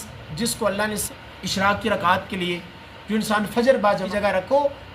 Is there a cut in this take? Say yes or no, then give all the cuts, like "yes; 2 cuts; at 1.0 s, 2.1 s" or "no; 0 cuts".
yes; 2 cuts; at 1.0 s, 4.0 s